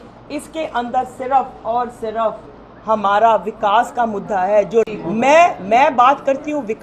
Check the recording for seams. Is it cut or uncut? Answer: cut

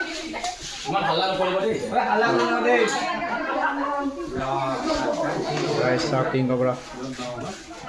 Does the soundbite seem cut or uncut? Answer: uncut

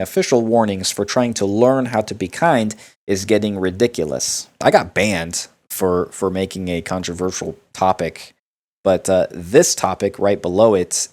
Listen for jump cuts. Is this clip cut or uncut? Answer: cut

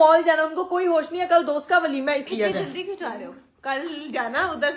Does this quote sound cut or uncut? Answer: cut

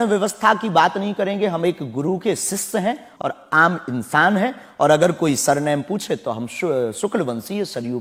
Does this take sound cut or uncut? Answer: uncut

